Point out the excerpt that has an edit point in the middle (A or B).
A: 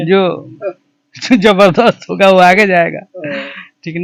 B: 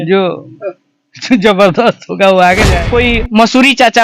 B